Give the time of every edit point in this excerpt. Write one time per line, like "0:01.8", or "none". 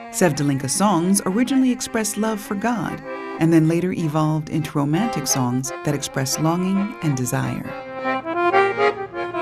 0:01.2

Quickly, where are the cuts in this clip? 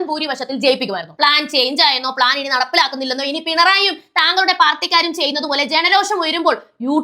0:01.1

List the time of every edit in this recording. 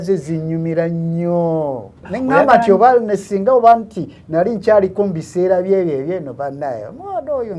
0:02.1

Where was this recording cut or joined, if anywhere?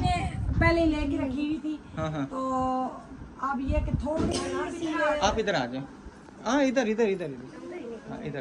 none

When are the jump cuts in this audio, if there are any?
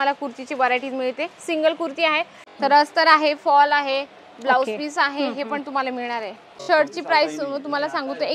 0:02.4
0:06.5

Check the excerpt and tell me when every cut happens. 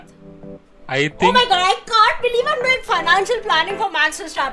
none

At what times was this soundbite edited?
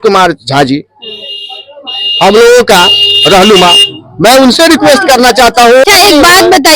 0:05.8

